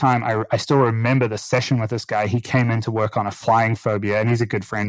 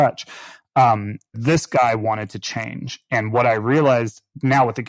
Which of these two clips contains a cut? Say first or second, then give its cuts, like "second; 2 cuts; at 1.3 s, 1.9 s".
second; 1 cut; at 1.3 s